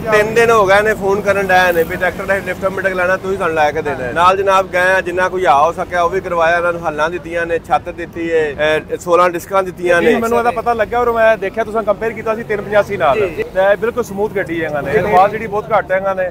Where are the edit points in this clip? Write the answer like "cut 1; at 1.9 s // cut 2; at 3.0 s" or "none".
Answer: cut 1; at 4.0 s // cut 2; at 8.5 s // cut 3; at 10.2 s // cut 4; at 13.2 s // cut 5; at 14.9 s